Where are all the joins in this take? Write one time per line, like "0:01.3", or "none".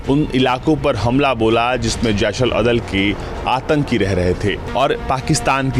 0:04.6